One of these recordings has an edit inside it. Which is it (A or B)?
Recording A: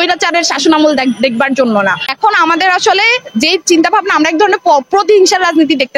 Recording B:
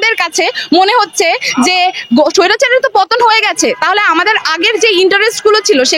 A